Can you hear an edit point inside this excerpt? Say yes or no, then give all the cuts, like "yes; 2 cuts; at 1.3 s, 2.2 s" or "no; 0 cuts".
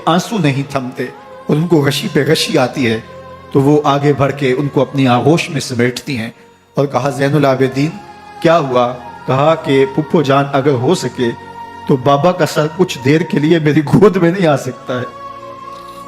yes; 1 cut; at 15.1 s